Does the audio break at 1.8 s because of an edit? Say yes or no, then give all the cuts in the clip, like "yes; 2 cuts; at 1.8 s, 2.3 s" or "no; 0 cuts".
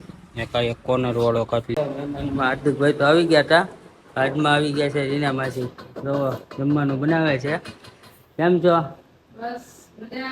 yes; 1 cut; at 1.8 s